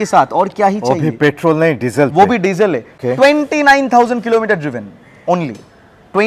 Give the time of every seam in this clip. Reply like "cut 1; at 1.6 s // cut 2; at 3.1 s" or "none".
cut 1; at 2.9 s